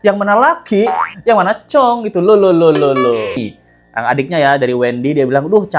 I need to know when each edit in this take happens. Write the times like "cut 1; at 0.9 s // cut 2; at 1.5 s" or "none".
cut 1; at 3.4 s